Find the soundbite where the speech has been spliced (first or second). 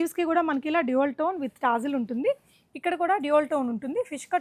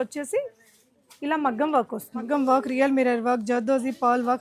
second